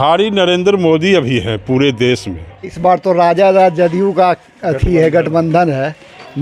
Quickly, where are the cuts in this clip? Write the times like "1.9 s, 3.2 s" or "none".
2.7 s